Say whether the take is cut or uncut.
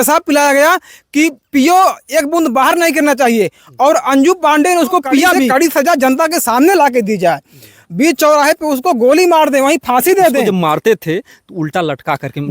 cut